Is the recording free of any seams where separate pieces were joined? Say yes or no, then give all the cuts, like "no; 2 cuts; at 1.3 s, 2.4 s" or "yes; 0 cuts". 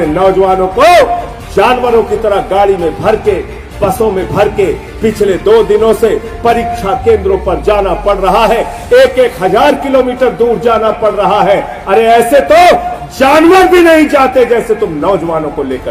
yes; 0 cuts